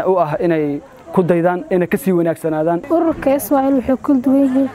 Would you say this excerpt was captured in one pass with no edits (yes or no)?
no